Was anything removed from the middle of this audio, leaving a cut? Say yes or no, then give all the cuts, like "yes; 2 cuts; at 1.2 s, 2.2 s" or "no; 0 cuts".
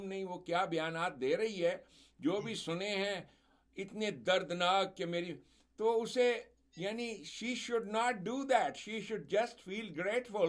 no; 0 cuts